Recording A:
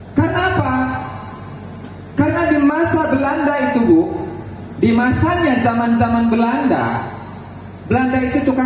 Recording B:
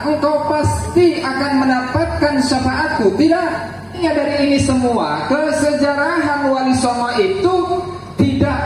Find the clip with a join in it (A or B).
B